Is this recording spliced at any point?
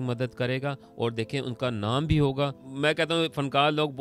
yes; 1 cut; at 2.6 s

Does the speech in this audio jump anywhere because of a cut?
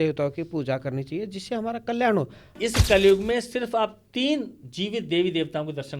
yes; 1 cut; at 2.5 s

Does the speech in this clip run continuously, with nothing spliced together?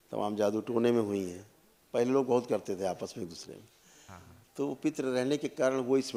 yes; 0 cuts

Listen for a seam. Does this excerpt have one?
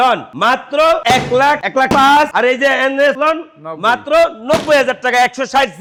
no; 0 cuts

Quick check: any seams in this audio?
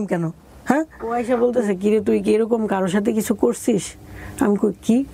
yes; 1 cut; at 1.1 s

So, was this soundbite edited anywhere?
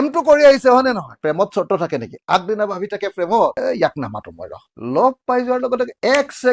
yes; 1 cut; at 1.1 s

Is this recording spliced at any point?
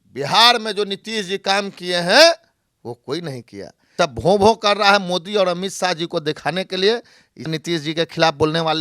yes; 2 cuts; at 3.9 s, 7.5 s

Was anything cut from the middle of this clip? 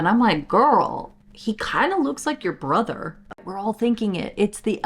yes; 1 cut; at 3.4 s

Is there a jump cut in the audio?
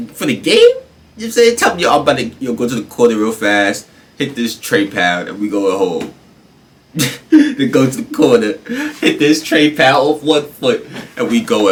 no; 0 cuts

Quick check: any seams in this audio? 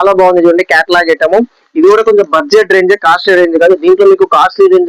no; 0 cuts

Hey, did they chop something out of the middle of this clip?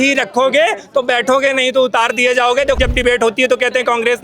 yes; 1 cut; at 2.8 s

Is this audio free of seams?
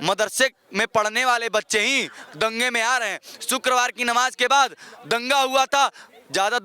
yes; 0 cuts

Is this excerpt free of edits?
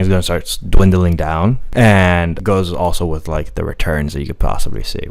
no; 2 cuts; at 1.6 s, 2.4 s

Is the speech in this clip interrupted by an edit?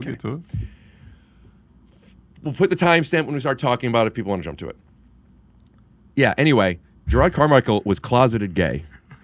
yes; 1 cut; at 7.1 s

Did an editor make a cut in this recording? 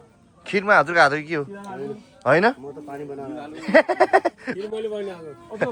no; 0 cuts

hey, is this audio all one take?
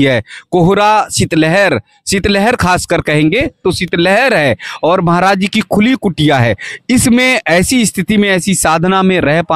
yes; 0 cuts

